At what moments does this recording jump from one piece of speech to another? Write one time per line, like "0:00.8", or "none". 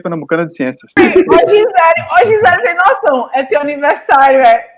0:01.0